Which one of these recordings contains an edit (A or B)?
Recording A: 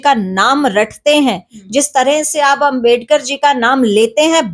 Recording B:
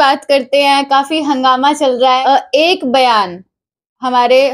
B